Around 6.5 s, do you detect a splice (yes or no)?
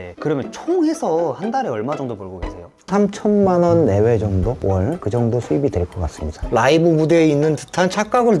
yes